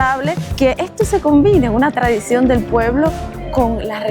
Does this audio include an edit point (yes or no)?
no